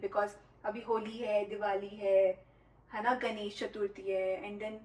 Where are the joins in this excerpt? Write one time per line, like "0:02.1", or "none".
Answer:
none